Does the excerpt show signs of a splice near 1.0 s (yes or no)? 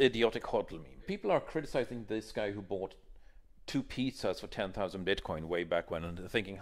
yes